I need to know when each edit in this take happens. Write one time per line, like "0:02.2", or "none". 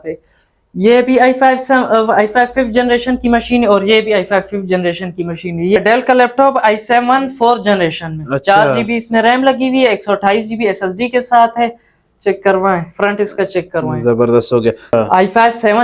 0:05.8
0:14.9